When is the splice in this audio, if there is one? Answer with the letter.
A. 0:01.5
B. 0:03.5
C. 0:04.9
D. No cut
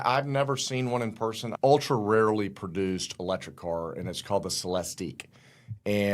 A